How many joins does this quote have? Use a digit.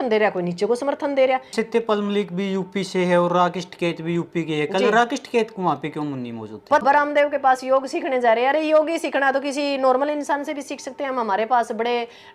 2